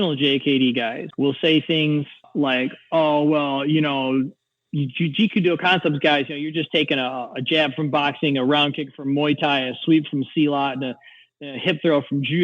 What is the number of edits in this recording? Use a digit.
2